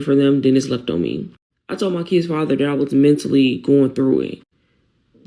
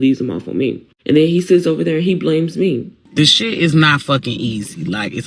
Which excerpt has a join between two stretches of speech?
second; 1 cut; at 3.0 s

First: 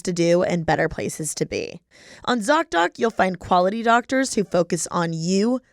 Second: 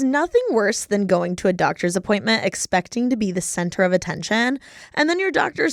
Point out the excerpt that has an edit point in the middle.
first; 1 cut; at 1.8 s

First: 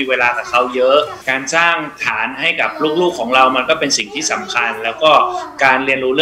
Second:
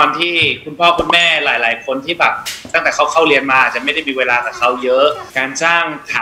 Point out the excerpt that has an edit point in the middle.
second; 1 cut; at 2.7 s

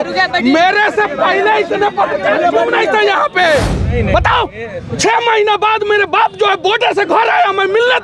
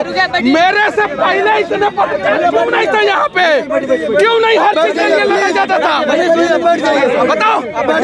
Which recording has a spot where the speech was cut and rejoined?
first; 1 cut; at 3.7 s

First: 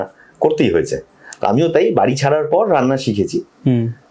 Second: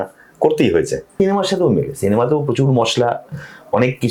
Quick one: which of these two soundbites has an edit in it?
second; 1 cut; at 1.0 s

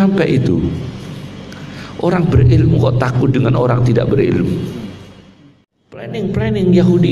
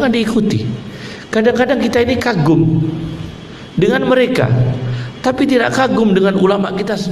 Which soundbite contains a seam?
first; 1 cut; at 6.1 s

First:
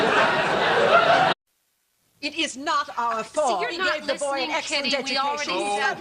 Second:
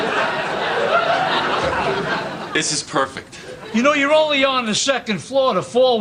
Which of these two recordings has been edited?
second; 1 cut; at 1.3 s

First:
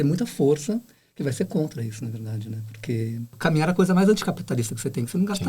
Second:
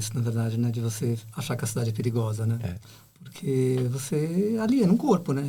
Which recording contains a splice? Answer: first; 1 cut; at 3.4 s

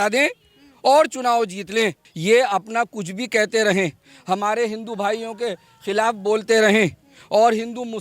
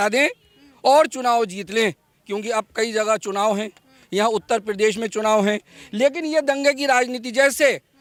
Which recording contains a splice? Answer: first; 1 cut; at 2.1 s

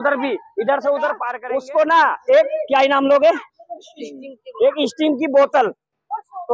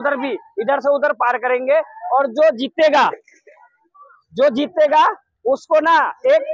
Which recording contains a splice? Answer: first; 1 cut; at 1.3 s

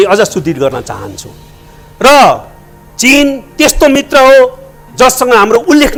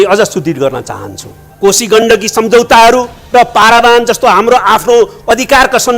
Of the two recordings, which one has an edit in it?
second; 1 cut; at 1.4 s

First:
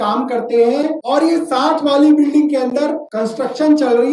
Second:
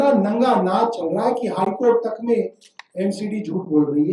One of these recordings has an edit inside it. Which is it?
first; 2 cuts; at 1.0 s, 3.1 s

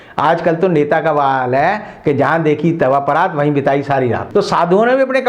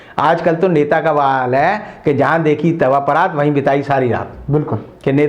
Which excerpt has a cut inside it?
first; 1 cut; at 4.2 s

